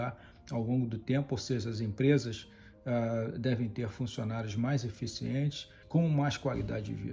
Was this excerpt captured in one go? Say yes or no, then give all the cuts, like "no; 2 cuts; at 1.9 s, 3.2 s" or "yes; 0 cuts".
no; 1 cut; at 5.8 s